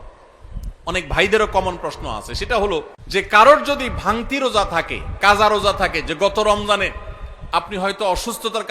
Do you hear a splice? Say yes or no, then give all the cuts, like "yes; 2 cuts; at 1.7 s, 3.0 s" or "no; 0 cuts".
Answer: yes; 1 cut; at 3.0 s